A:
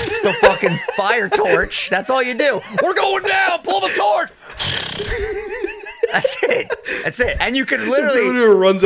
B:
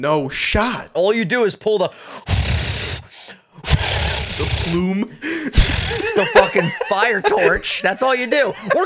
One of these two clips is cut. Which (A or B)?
B